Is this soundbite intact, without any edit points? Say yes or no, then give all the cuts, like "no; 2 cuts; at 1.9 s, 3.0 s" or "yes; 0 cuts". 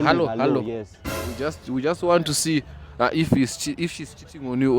no; 1 cut; at 1.4 s